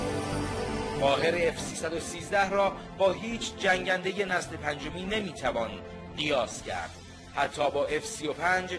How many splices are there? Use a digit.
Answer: 1